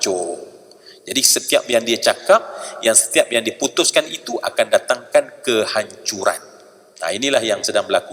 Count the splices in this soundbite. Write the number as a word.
zero